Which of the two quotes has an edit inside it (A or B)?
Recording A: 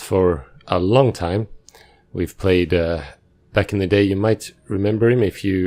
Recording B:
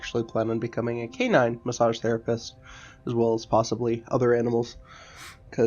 B